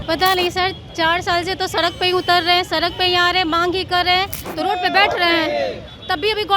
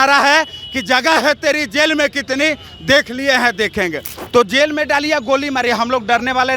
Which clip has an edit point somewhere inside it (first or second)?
first